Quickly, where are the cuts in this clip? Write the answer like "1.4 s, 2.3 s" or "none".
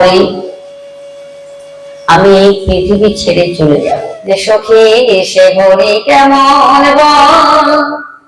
4.1 s